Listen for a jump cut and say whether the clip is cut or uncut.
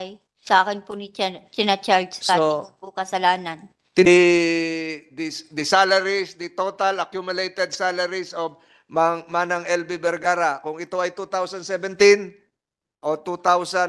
cut